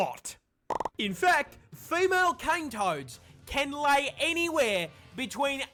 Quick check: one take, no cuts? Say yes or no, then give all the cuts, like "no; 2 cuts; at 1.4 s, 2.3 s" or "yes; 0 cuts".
yes; 0 cuts